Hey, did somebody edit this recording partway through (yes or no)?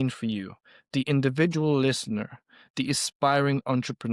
no